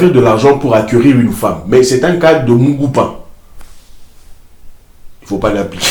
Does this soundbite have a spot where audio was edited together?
no; 0 cuts

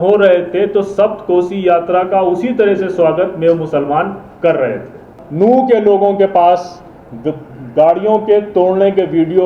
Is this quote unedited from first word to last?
no; 1 cut; at 5.2 s

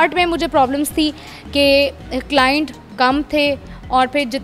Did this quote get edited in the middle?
no; 0 cuts

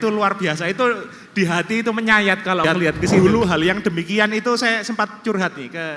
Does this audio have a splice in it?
yes; 1 cut; at 3.2 s

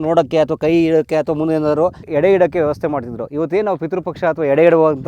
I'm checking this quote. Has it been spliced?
yes; 1 cut; at 2.0 s

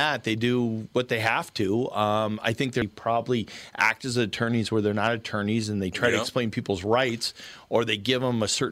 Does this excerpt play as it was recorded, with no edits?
no; 1 cut; at 2.8 s

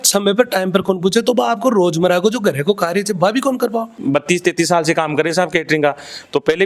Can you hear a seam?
yes; 1 cut; at 4.0 s

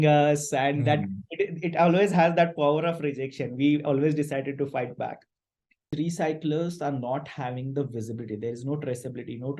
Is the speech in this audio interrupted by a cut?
yes; 1 cut; at 5.9 s

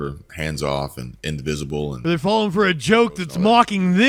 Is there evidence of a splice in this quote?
no; 0 cuts

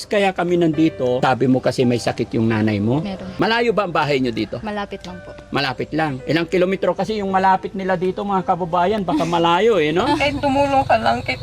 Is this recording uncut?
no; 4 cuts; at 1.2 s, 3.2 s, 6.2 s, 10.3 s

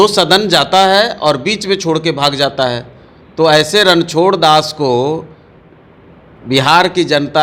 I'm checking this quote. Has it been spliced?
no; 0 cuts

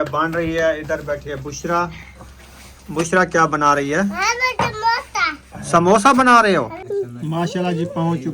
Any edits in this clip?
yes; 1 cut; at 6.8 s

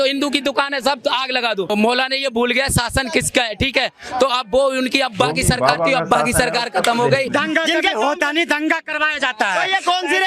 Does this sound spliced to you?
yes; 2 cuts; at 1.7 s, 7.3 s

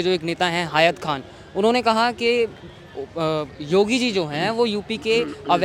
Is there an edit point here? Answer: no; 0 cuts

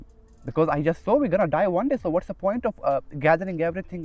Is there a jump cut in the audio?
no; 0 cuts

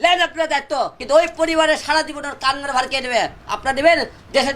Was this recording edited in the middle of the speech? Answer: yes; 1 cut; at 1.0 s

